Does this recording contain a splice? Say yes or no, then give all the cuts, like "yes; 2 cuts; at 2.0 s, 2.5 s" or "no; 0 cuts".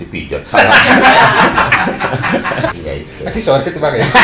yes; 1 cut; at 2.8 s